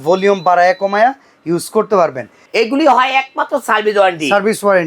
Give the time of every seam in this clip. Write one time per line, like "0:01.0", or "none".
0:02.4